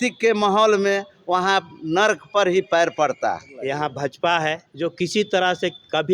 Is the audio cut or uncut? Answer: cut